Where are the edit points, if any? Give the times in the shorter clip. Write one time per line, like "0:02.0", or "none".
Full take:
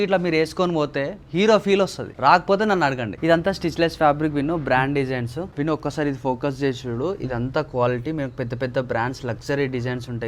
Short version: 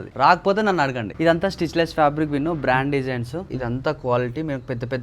0:03.5